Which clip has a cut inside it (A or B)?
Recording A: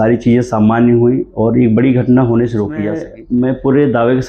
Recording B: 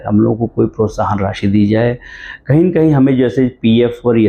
A